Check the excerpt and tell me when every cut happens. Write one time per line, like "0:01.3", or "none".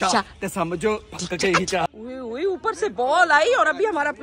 0:01.9